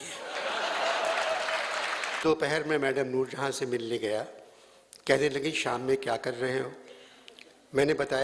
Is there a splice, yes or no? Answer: yes